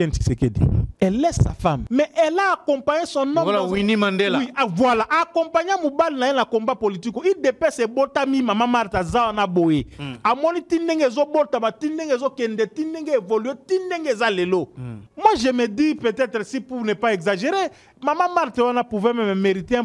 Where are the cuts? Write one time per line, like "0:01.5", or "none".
none